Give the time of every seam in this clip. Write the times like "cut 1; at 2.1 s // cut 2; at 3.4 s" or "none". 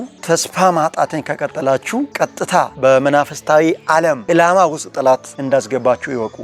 cut 1; at 4.2 s // cut 2; at 5.3 s